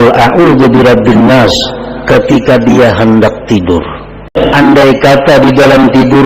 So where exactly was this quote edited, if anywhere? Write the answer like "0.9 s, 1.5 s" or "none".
4.3 s